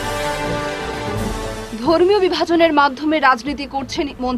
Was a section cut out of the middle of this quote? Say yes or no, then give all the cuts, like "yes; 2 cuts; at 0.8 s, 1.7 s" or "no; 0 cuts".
no; 0 cuts